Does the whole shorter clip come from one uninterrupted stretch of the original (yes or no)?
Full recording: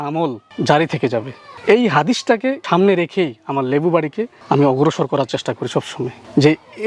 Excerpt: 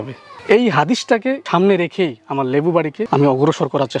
no